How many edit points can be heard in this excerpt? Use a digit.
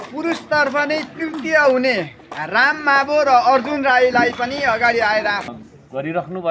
1